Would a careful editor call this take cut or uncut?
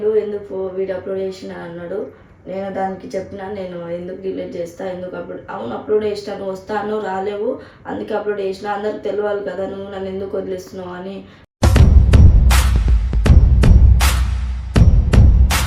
uncut